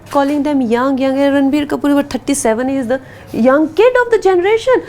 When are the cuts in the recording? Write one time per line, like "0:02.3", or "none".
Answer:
none